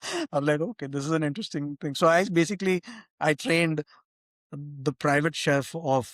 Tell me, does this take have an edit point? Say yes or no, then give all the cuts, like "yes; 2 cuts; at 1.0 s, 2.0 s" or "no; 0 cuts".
no; 0 cuts